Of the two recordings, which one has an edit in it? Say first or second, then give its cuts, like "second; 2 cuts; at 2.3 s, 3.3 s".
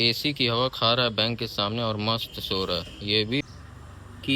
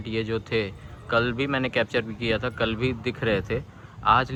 first; 1 cut; at 3.4 s